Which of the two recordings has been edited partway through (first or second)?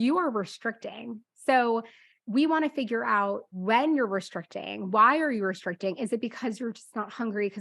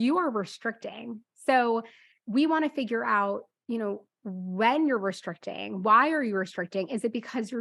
first